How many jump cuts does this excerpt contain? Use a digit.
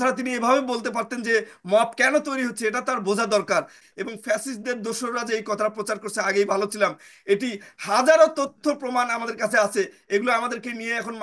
1